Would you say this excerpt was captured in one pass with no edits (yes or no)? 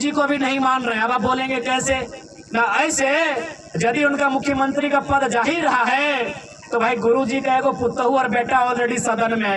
yes